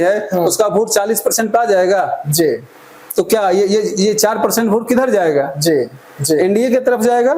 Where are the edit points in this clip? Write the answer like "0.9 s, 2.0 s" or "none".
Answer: none